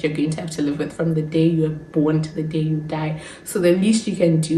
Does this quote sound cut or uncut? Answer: uncut